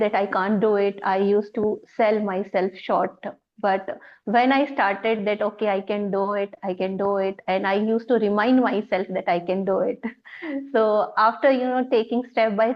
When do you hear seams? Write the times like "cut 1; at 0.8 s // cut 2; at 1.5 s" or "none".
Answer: none